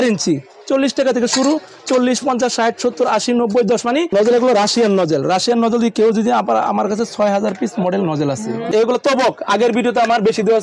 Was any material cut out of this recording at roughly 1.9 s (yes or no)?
no